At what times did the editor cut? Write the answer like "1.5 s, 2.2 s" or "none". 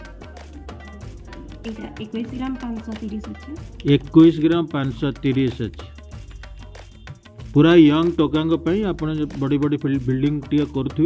none